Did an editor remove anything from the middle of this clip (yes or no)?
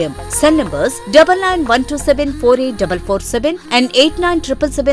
no